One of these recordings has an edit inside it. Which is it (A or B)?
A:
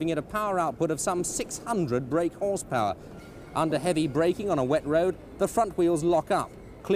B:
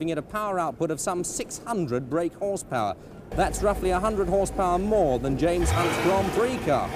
B